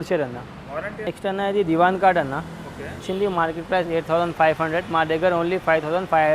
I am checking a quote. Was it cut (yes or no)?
yes